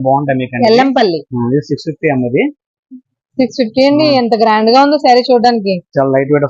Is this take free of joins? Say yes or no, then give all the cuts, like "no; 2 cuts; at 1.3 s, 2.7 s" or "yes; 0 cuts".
yes; 0 cuts